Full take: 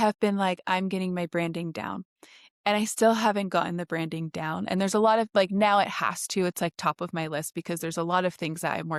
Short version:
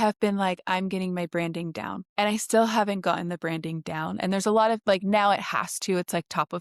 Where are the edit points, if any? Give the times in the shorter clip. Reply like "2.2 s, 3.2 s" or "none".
2.0 s